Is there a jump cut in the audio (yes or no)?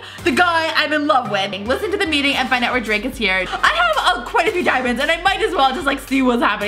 yes